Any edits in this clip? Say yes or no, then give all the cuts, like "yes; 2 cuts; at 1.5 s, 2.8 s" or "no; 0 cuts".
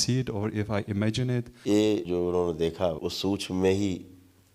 yes; 3 cuts; at 1.5 s, 2.0 s, 3.0 s